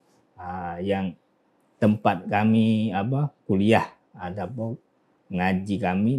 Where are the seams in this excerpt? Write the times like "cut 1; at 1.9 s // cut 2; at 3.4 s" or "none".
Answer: none